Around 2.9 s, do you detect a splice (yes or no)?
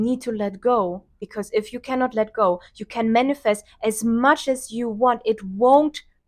no